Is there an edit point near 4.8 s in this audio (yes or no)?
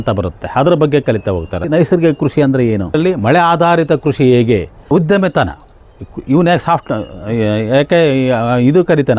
yes